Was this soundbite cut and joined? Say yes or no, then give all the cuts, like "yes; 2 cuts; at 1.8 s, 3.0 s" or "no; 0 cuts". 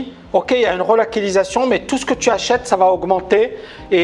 no; 0 cuts